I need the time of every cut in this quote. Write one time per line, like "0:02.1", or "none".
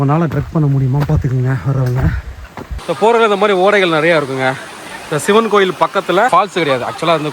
0:02.7
0:06.3